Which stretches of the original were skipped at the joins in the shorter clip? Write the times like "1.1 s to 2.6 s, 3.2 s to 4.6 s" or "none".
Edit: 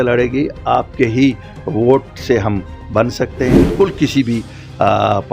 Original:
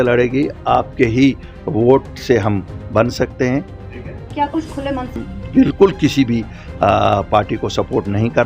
3.7 s to 5.7 s

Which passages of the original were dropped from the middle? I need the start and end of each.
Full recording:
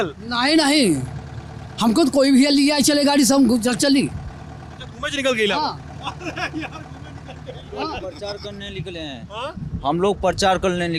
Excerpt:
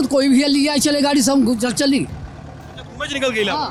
none

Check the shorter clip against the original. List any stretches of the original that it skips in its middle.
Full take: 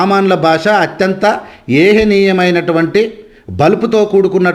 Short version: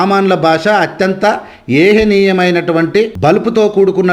3.1 s to 3.5 s

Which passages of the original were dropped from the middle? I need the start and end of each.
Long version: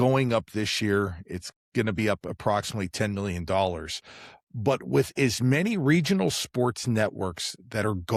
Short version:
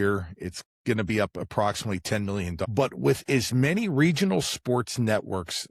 3.5 s to 4.5 s

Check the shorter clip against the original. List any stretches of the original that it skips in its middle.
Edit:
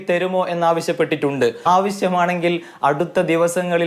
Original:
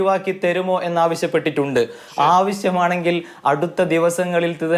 2.0 s to 2.3 s

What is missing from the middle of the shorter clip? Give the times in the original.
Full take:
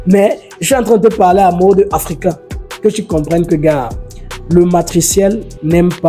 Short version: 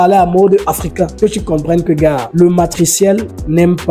2.4 s to 2.7 s, 3.9 s to 4.4 s

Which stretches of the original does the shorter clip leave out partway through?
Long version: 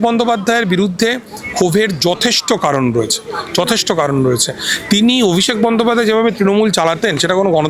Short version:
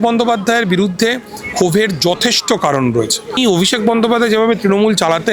3.4 s to 5.1 s

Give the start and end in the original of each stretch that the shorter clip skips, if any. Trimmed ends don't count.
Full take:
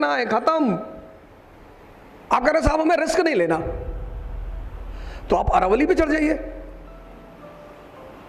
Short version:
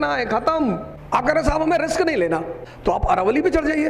0.9 s to 2.1 s, 3.8 s to 5.1 s

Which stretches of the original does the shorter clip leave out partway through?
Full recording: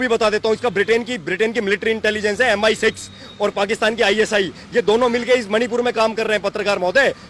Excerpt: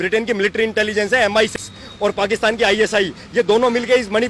2.8 s to 2.9 s

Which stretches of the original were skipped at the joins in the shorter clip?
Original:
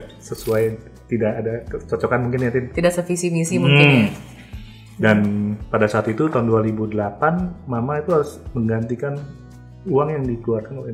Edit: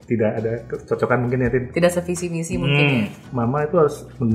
4.3 s to 7.6 s

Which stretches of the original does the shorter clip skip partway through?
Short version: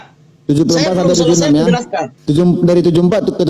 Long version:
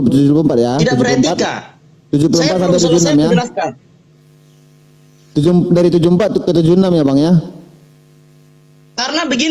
3.8 s to 5.2 s

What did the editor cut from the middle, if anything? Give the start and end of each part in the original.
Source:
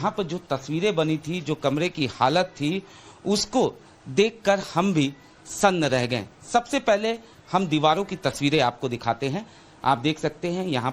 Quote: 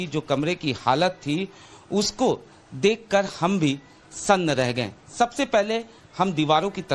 none

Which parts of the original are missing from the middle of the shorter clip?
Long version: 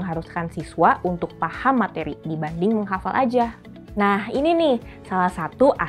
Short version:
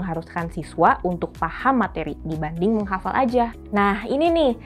3.6 s to 3.8 s

